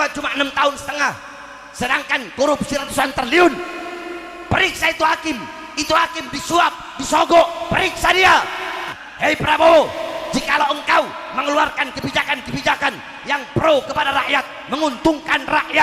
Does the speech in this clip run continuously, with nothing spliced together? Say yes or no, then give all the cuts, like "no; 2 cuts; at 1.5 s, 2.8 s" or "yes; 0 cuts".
no; 1 cut; at 9.0 s